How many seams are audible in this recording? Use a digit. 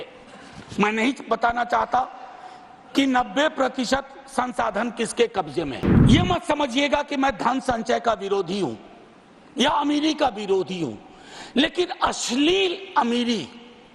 1